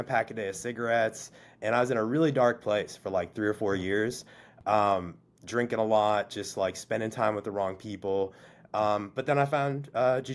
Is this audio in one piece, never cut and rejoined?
yes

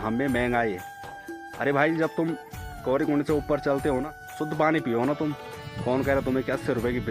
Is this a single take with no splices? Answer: no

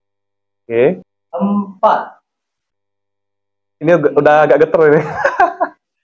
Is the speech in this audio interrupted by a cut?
yes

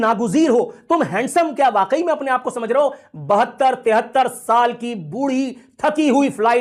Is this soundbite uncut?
yes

